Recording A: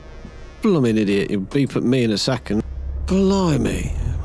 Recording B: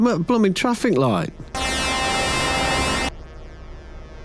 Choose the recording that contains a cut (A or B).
A